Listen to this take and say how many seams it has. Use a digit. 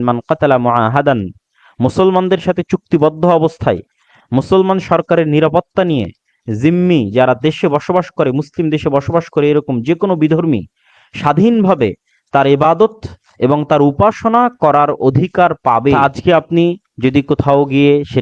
1